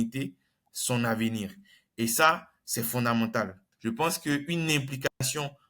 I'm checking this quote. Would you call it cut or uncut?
cut